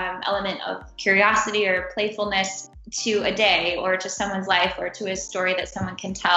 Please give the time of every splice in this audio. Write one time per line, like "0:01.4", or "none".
none